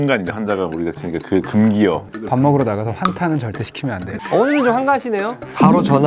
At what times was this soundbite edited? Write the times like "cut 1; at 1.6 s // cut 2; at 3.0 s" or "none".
cut 1; at 2.1 s // cut 2; at 4.1 s